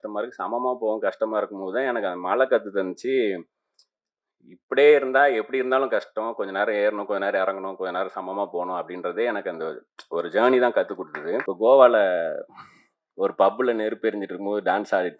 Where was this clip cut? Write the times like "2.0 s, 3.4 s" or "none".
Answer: 11.5 s